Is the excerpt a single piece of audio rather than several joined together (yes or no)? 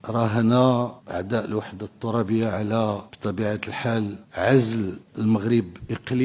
no